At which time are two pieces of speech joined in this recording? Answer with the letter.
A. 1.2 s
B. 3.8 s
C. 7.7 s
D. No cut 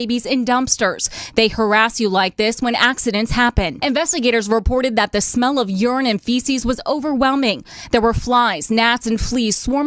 B